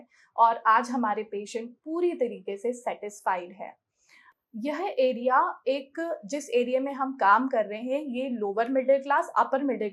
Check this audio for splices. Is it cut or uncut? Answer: uncut